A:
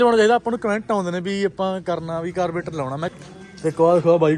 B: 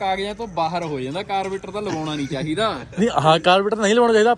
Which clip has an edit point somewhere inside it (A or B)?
A